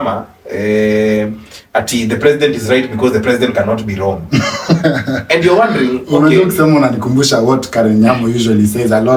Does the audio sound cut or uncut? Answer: uncut